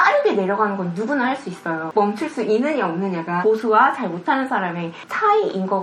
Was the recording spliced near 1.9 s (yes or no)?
yes